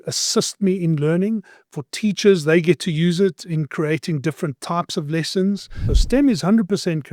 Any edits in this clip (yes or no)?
yes